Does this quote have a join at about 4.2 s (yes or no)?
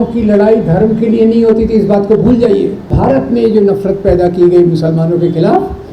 no